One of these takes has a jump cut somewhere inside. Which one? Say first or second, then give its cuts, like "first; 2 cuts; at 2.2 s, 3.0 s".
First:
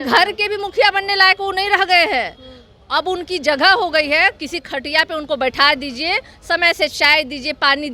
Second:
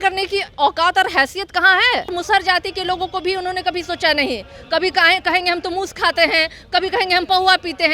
second; 1 cut; at 2.1 s